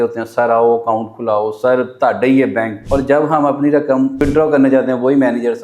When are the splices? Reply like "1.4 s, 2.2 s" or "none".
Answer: 2.8 s, 4.2 s